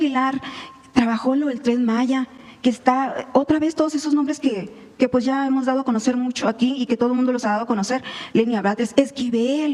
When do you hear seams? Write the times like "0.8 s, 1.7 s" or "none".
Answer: none